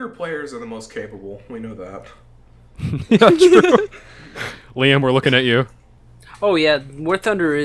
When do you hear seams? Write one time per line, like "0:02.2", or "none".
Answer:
0:06.3

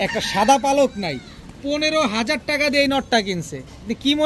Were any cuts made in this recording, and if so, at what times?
none

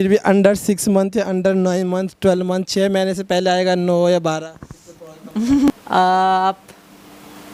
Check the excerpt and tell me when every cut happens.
none

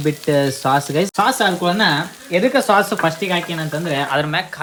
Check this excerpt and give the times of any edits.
none

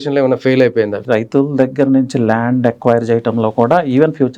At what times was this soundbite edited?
0:01.0

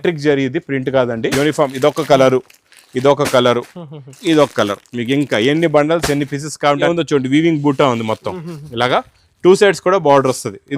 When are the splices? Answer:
0:01.3
0:06.9

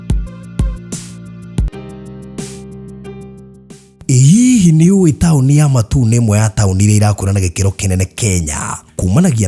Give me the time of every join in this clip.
0:01.7

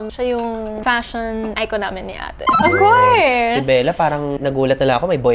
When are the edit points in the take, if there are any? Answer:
0:02.5
0:03.9

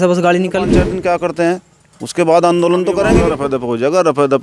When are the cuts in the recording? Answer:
0:00.9
0:03.3

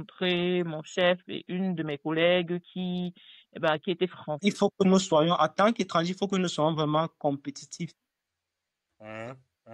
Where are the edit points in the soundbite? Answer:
0:04.4

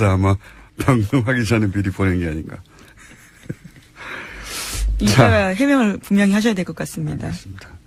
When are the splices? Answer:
none

